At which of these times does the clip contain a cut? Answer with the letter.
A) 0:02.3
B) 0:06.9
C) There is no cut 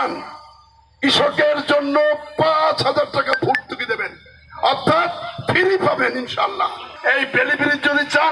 B